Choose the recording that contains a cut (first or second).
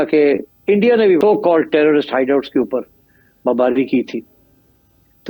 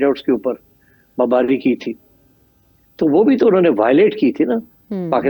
first